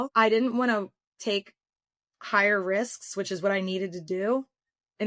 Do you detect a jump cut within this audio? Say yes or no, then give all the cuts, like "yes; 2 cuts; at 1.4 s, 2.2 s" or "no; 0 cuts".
no; 0 cuts